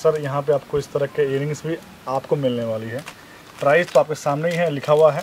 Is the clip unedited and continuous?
yes; 0 cuts

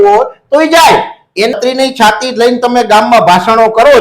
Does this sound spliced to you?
yes; 1 cut; at 1.5 s

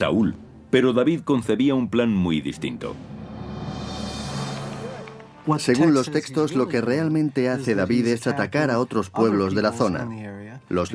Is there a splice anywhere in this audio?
no; 0 cuts

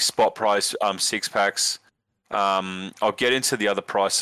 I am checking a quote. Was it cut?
no; 0 cuts

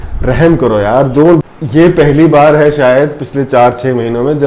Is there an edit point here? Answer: yes; 1 cut; at 1.4 s

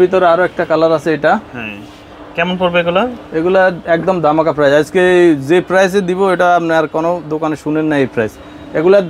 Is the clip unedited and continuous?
yes; 0 cuts

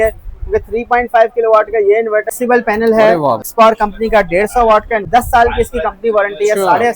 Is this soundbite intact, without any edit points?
no; 3 cuts; at 2.3 s, 3.5 s, 5.1 s

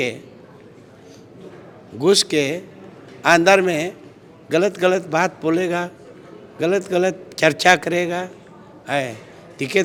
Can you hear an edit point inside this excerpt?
no; 0 cuts

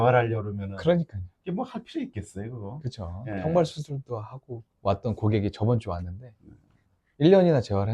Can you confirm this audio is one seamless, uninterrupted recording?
yes; 0 cuts

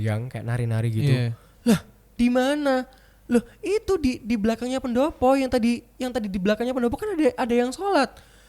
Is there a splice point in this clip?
no; 0 cuts

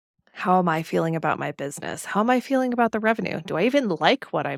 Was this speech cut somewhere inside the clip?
no; 0 cuts

